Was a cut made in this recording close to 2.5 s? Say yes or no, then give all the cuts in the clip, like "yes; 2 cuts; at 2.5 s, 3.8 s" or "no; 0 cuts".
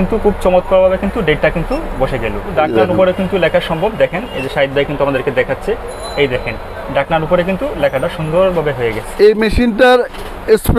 yes; 1 cut; at 2.5 s